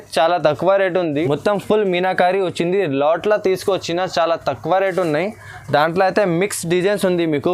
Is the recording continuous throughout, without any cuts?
no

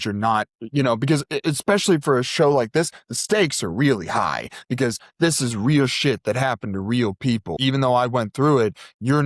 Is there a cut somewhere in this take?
yes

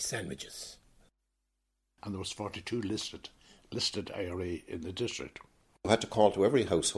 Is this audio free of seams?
no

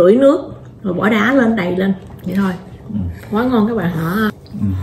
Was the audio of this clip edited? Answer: yes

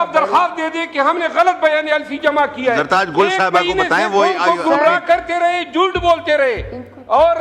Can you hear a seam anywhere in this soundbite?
no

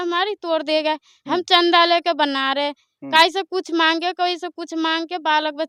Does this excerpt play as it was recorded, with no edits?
yes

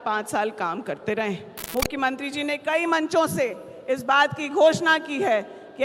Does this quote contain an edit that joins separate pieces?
yes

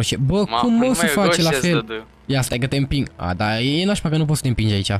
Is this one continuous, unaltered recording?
yes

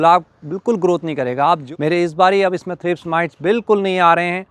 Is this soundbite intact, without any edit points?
no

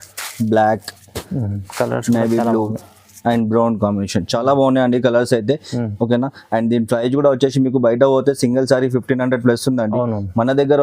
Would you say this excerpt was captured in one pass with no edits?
yes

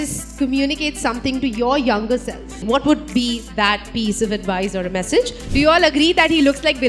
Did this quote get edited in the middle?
yes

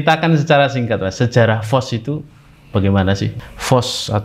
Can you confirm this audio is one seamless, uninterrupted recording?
no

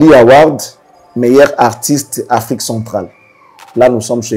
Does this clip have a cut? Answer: no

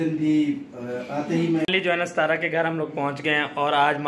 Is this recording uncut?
no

